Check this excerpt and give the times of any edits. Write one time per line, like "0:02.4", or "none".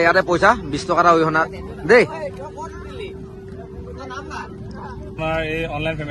0:05.1